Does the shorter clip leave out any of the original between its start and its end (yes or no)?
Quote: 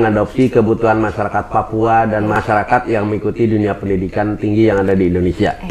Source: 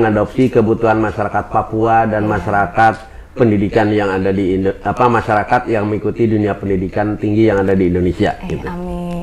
yes